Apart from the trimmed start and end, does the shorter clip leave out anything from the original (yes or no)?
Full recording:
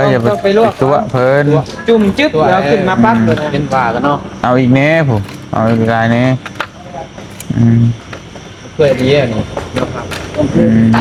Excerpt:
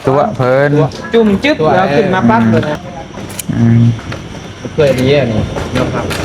yes